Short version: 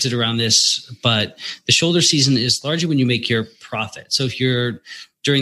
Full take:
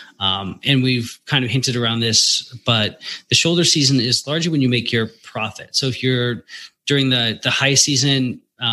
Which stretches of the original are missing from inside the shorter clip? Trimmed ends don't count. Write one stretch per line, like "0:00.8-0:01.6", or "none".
none